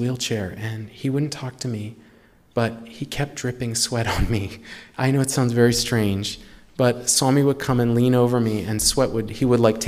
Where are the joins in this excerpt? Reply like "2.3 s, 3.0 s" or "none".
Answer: none